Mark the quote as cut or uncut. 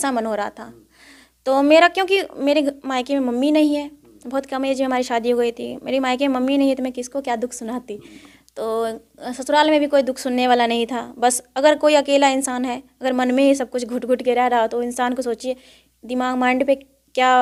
uncut